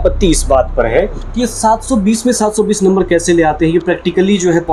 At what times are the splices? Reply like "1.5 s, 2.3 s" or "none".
none